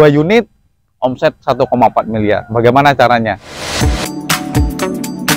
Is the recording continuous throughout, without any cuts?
no; 1 cut; at 3.2 s

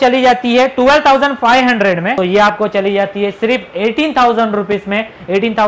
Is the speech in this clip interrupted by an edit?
yes; 1 cut; at 2.1 s

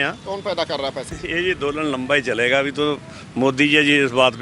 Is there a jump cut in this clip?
yes; 1 cut; at 1.1 s

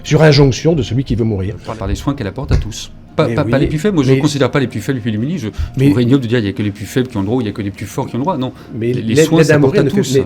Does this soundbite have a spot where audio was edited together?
yes; 1 cut; at 1.6 s

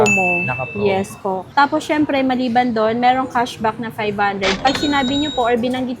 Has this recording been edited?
yes; 1 cut; at 1.4 s

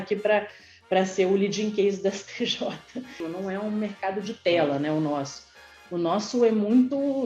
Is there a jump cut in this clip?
yes; 1 cut; at 3.2 s

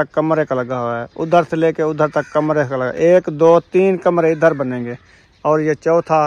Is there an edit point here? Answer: no; 0 cuts

